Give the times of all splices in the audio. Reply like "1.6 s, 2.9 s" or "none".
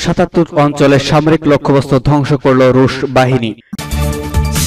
3.7 s